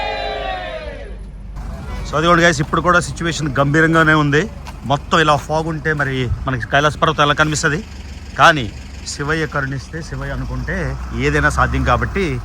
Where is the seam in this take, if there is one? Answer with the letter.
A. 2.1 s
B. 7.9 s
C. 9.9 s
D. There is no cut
A